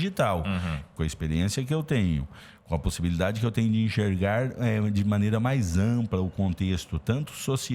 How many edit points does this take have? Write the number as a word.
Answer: one